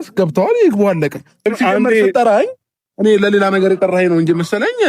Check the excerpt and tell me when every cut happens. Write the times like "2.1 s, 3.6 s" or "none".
1.5 s